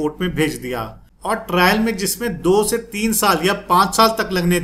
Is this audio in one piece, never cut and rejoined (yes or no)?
no